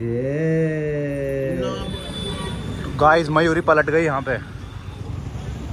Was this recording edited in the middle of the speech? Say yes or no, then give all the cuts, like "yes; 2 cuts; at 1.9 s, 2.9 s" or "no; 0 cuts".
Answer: yes; 1 cut; at 2.0 s